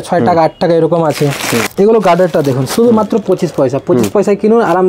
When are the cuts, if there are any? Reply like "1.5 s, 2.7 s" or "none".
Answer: 1.7 s